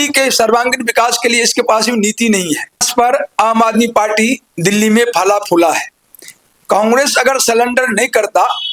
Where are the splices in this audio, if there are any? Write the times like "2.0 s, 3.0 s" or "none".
2.9 s